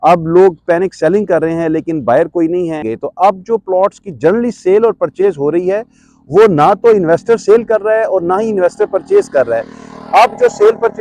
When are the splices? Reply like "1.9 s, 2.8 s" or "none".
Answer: 3.0 s